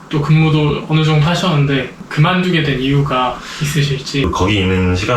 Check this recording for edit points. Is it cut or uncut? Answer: cut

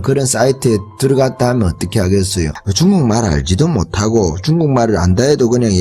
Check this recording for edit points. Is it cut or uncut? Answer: uncut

